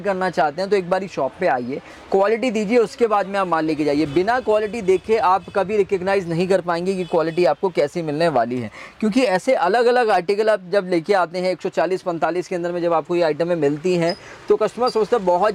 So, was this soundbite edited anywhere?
no; 0 cuts

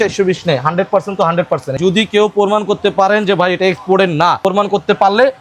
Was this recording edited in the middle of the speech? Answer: yes; 2 cuts; at 1.8 s, 4.4 s

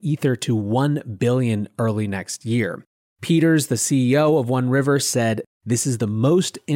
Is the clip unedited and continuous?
no; 1 cut; at 5.5 s

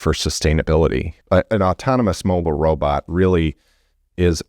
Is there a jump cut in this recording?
yes; 1 cut; at 1.2 s

